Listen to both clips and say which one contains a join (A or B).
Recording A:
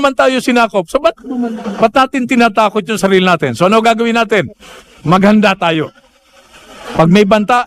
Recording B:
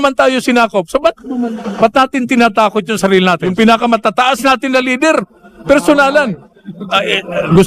B